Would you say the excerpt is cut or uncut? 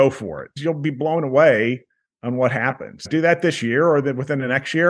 cut